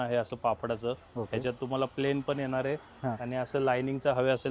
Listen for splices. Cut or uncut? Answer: uncut